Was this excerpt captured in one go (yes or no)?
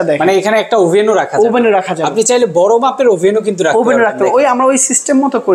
yes